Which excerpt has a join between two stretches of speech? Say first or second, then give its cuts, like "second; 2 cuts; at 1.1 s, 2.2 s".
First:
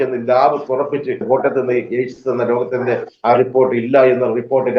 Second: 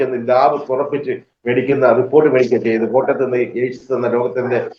first; 1 cut; at 1.2 s